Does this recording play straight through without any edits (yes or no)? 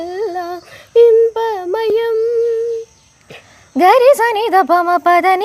yes